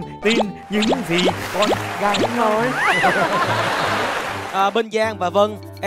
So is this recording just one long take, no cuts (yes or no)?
no